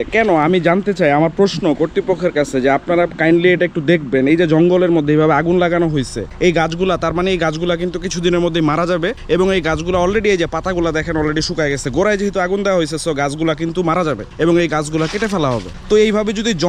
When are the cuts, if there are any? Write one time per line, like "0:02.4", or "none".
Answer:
none